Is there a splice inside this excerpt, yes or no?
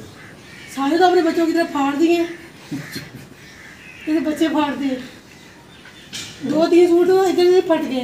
no